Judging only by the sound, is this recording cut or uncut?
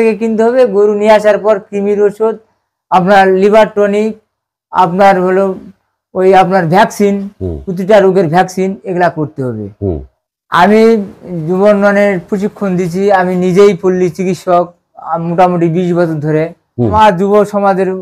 cut